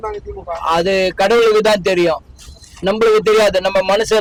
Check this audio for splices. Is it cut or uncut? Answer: uncut